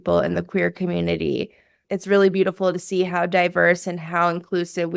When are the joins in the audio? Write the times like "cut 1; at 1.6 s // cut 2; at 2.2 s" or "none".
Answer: cut 1; at 1.8 s